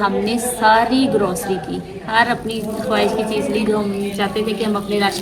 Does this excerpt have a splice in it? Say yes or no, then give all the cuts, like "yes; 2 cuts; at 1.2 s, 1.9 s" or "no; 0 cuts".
no; 0 cuts